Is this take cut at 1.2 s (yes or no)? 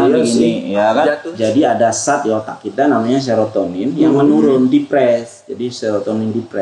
yes